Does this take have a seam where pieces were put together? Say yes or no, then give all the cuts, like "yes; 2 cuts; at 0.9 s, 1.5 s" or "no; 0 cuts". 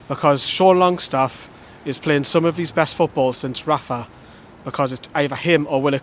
no; 0 cuts